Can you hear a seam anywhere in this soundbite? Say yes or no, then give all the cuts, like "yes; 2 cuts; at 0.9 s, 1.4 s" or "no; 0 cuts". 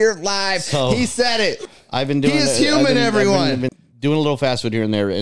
yes; 2 cuts; at 1.7 s, 3.7 s